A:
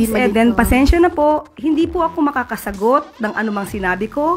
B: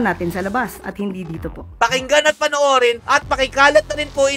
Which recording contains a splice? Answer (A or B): B